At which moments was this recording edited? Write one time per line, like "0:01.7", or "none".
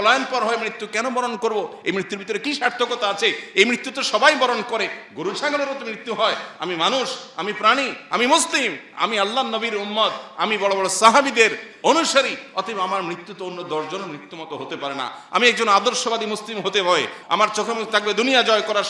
0:17.2